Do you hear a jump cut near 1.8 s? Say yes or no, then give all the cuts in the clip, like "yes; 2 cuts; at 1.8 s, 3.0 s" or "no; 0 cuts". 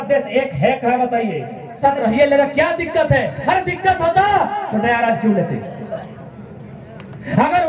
yes; 1 cut; at 1.8 s